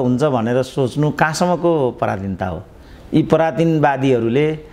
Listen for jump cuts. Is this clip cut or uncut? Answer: uncut